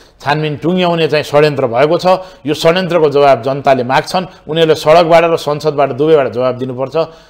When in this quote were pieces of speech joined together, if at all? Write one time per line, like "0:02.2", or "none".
none